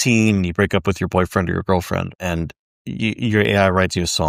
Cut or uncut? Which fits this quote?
uncut